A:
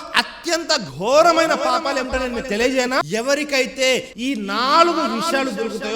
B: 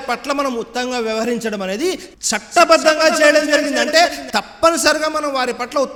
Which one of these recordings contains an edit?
A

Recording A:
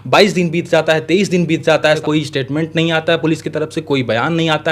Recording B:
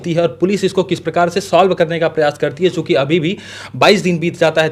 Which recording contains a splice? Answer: A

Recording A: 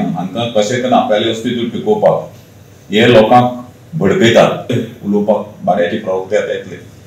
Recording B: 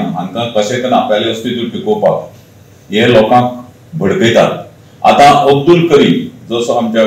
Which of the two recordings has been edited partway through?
A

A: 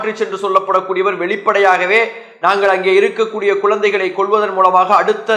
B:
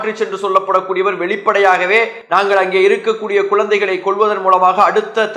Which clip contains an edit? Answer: B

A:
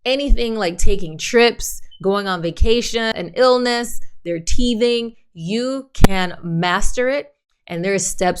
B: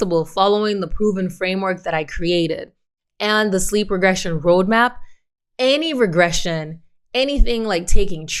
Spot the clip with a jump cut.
A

